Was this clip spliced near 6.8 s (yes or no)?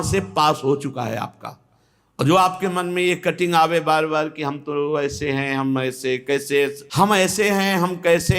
yes